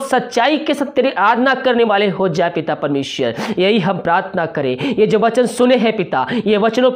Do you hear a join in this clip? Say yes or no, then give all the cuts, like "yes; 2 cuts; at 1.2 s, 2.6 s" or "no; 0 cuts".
no; 0 cuts